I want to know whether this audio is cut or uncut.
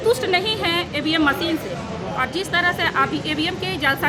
uncut